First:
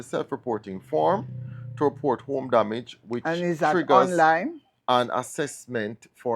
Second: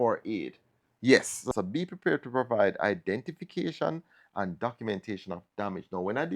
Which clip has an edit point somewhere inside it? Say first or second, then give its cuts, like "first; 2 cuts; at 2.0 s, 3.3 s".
second; 1 cut; at 1.5 s